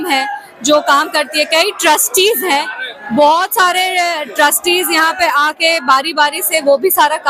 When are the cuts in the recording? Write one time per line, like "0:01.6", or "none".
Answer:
none